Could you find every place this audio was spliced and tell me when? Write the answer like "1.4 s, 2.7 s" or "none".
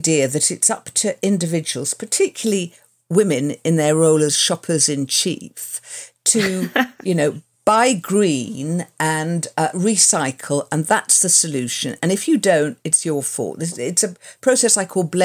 none